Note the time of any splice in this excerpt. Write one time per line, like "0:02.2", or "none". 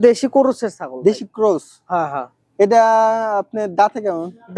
none